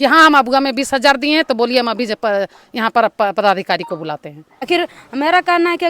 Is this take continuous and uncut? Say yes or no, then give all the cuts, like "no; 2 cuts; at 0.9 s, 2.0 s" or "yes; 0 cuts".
no; 1 cut; at 4.7 s